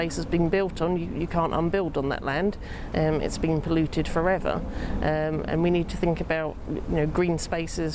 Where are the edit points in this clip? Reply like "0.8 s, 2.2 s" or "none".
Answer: none